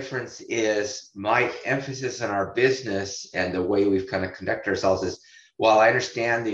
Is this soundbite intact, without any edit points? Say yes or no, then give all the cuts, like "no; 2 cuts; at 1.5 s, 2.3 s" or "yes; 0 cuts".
yes; 0 cuts